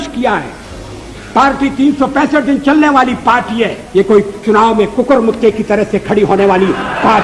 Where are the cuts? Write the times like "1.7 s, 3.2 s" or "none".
3.8 s